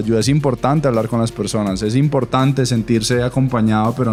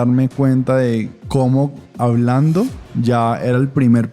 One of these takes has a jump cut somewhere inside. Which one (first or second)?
second